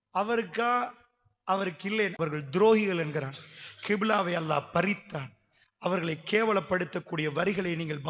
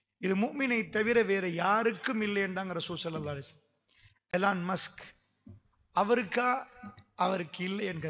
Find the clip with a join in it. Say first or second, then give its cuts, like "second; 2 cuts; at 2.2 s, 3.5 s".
first; 1 cut; at 2.2 s